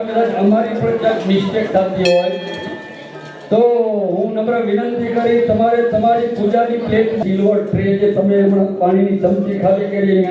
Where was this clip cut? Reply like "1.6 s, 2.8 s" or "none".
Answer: 7.2 s